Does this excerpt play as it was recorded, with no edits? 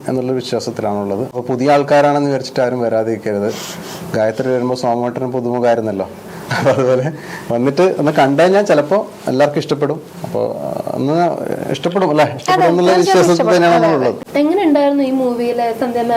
yes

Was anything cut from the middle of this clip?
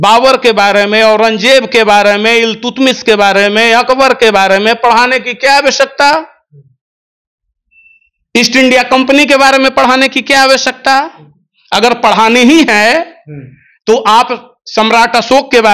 no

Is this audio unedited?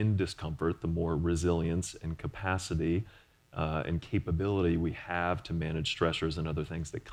yes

